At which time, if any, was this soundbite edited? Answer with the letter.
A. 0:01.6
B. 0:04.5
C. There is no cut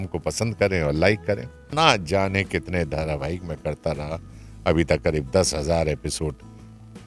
A